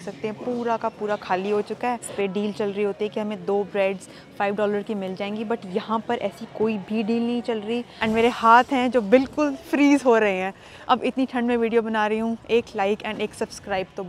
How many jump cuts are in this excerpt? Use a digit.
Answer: 2